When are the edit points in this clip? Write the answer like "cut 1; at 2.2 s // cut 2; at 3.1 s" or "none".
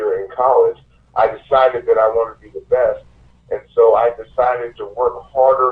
none

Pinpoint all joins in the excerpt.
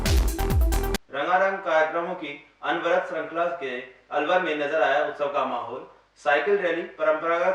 cut 1; at 0.9 s

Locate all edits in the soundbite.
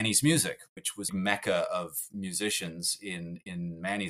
cut 1; at 1.1 s

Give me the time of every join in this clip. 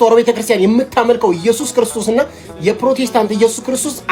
none

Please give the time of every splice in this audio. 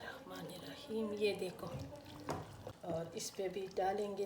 cut 1; at 2.7 s

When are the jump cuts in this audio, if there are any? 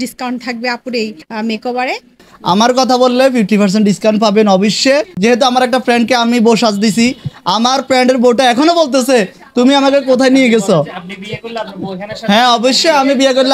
cut 1; at 1.2 s // cut 2; at 2.3 s // cut 3; at 5.1 s

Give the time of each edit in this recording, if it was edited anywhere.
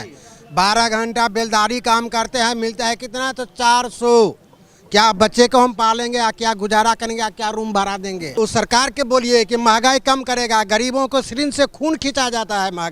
cut 1; at 8.4 s

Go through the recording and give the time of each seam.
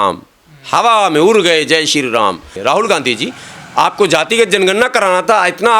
cut 1; at 2.5 s

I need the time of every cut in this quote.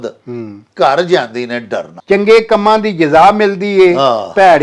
cut 1; at 1.9 s

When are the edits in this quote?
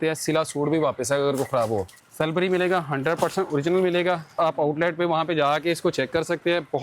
cut 1; at 2.0 s // cut 2; at 4.4 s

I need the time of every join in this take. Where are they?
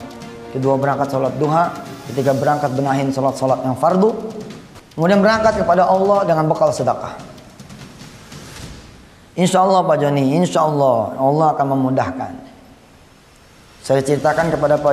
none

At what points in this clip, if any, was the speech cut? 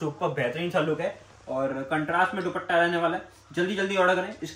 none

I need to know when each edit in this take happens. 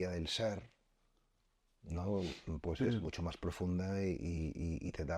none

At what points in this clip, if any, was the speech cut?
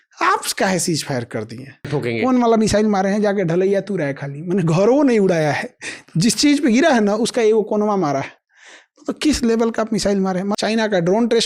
cut 1; at 1.9 s // cut 2; at 10.5 s

